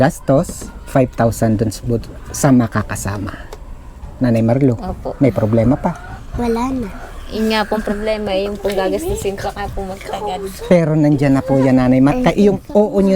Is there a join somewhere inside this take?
no; 0 cuts

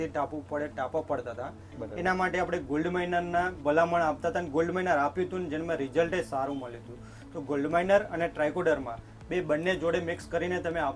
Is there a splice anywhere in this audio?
no; 0 cuts

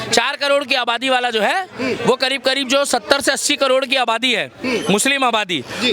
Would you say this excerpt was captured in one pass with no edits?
yes; 0 cuts

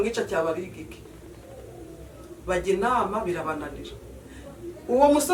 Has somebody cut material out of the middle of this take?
no; 0 cuts

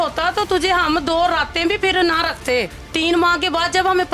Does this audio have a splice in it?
yes; 1 cut; at 2.8 s

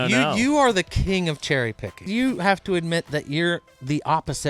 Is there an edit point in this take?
yes; 1 cut; at 2.1 s

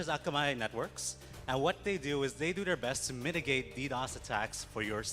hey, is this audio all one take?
no; 1 cut; at 1.5 s

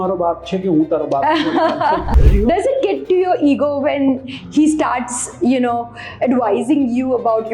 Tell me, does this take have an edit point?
yes; 1 cut; at 2.1 s

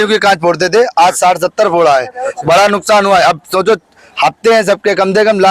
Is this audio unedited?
yes; 0 cuts

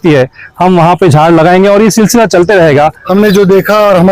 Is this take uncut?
no; 1 cut; at 3.0 s

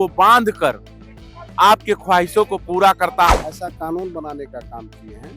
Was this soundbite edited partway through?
yes; 1 cut; at 3.3 s

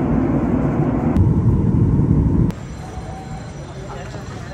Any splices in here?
no; 0 cuts

